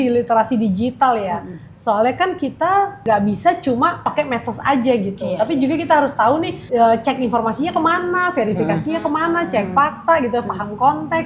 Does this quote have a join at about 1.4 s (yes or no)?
no